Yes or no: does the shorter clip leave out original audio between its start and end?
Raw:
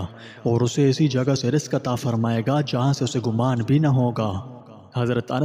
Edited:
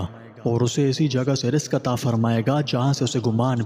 no